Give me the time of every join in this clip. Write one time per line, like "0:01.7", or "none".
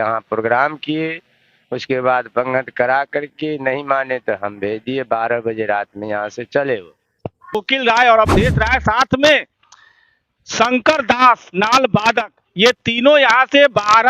0:07.6